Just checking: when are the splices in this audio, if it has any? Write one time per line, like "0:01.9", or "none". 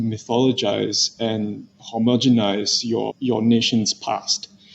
0:03.1